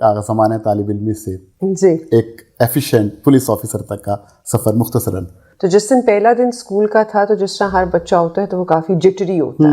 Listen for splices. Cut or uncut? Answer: cut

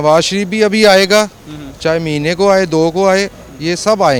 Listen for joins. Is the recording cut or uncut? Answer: uncut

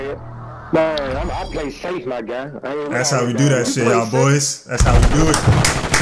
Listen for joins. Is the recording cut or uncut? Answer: uncut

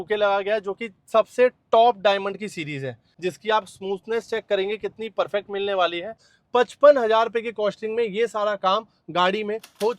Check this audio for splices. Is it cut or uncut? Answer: cut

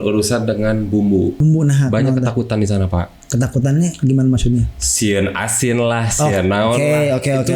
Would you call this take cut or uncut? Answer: cut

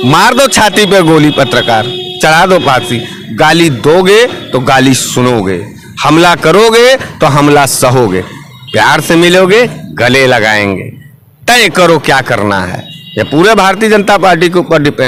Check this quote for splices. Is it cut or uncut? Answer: uncut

